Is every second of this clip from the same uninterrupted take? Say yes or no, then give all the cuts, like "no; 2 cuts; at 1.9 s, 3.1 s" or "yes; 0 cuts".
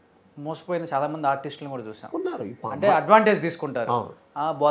yes; 0 cuts